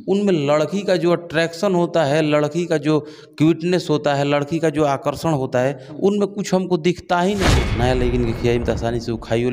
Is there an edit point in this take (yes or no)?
yes